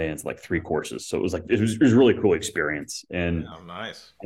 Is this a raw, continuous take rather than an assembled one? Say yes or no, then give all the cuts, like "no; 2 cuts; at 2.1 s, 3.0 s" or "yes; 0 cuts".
yes; 0 cuts